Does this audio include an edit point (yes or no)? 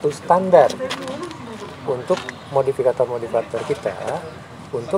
no